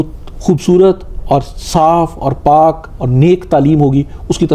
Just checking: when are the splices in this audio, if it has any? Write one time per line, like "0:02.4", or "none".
none